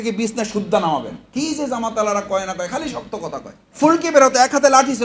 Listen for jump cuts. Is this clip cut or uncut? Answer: cut